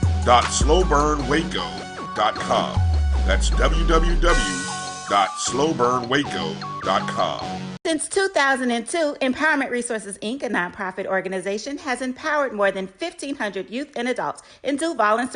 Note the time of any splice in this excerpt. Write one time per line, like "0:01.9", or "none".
0:07.6